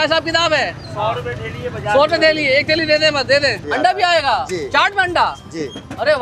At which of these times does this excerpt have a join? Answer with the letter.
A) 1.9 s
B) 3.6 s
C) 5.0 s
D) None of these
B